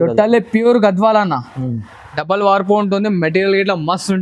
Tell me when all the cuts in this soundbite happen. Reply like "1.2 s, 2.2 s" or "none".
none